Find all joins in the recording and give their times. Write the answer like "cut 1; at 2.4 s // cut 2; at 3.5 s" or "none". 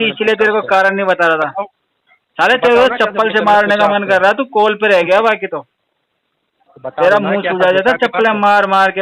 none